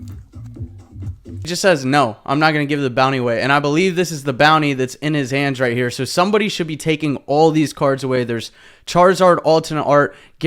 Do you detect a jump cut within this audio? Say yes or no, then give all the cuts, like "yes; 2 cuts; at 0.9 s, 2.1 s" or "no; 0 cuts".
yes; 1 cut; at 1.5 s